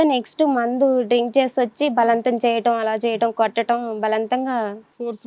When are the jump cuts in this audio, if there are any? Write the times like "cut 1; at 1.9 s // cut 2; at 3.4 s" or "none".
none